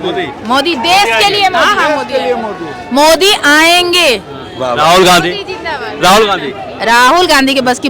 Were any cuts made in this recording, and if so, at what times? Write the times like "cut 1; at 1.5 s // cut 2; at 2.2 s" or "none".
none